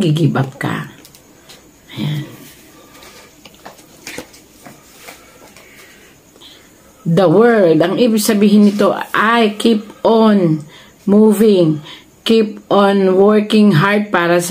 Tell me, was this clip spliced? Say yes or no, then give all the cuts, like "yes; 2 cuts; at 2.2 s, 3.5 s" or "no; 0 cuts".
no; 0 cuts